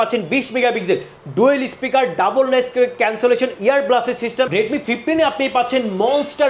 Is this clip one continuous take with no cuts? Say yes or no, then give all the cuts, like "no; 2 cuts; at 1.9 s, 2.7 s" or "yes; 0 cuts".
no; 1 cut; at 4.5 s